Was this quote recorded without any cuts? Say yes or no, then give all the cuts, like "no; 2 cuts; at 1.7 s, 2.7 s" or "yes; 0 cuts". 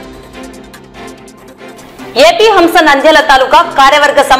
no; 1 cut; at 1.4 s